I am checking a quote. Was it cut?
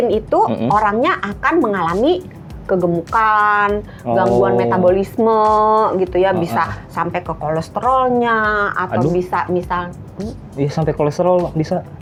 no; 0 cuts

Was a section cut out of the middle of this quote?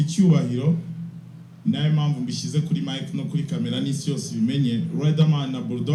no; 0 cuts

